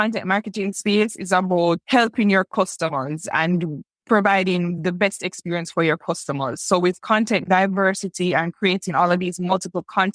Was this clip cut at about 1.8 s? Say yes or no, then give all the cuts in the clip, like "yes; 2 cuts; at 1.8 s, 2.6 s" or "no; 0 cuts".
yes; 1 cut; at 1.8 s